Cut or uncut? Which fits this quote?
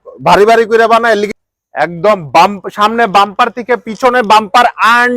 cut